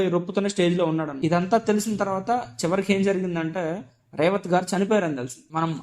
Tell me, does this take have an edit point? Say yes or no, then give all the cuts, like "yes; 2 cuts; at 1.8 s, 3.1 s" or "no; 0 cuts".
yes; 1 cut; at 1.1 s